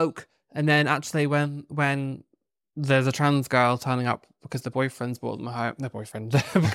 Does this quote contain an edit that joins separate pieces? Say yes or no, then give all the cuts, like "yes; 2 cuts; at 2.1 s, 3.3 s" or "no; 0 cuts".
no; 0 cuts